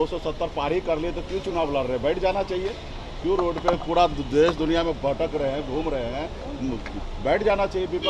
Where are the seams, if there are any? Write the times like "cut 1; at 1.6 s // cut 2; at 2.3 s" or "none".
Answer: none